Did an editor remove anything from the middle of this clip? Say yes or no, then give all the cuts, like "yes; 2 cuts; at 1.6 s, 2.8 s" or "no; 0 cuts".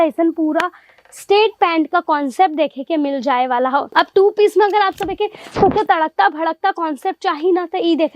no; 0 cuts